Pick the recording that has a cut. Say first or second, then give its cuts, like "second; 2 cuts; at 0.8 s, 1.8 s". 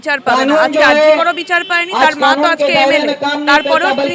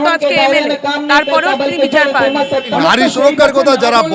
second; 1 cut; at 2.7 s